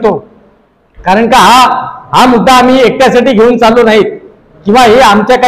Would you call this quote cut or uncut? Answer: uncut